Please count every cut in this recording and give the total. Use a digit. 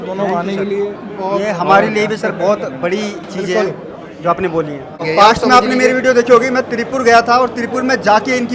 1